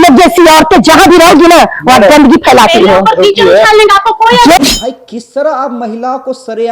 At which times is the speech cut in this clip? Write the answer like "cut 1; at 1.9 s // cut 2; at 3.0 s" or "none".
cut 1; at 4.7 s